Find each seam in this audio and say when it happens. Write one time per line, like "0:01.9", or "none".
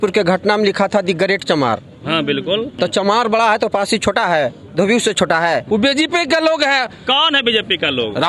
0:02.7
0:05.6